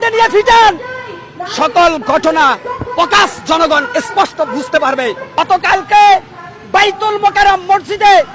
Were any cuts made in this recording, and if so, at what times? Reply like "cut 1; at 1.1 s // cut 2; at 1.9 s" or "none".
cut 1; at 5.4 s